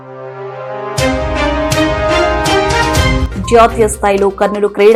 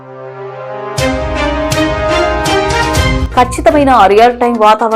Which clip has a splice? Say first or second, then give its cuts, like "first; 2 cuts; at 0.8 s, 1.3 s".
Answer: second; 1 cut; at 3.2 s